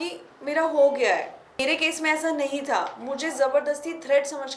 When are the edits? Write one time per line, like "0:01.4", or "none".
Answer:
0:01.6